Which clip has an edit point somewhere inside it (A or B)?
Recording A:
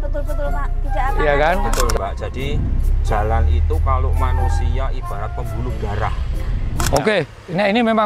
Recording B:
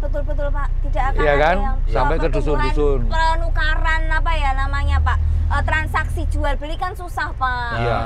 A